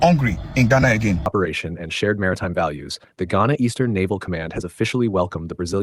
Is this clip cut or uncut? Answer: cut